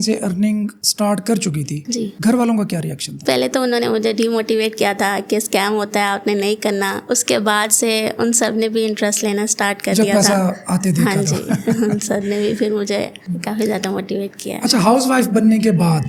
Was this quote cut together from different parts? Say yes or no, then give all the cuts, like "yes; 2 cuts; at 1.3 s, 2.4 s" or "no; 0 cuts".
no; 0 cuts